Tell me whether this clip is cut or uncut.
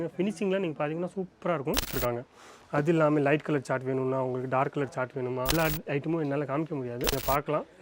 cut